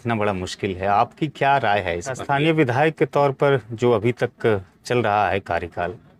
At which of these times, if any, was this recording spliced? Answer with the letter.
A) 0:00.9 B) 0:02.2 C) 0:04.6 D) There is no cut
B